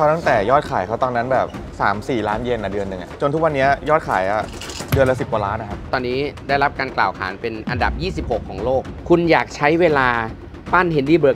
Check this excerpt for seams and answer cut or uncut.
cut